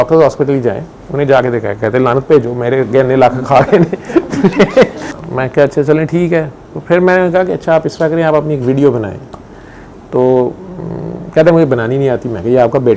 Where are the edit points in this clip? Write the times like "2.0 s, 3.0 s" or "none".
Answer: 5.0 s

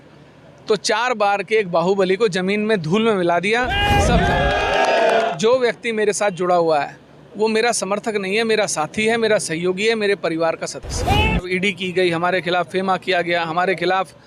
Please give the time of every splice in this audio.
5.3 s, 11.5 s

